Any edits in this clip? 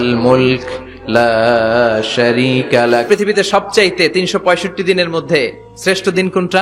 yes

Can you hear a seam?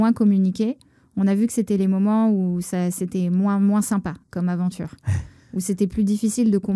no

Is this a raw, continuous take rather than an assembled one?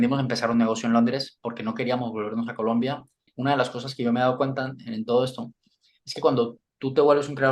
no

